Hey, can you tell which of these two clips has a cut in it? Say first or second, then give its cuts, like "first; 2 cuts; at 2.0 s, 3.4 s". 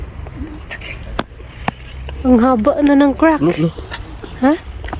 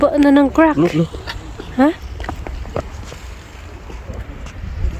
second; 1 cut; at 4.1 s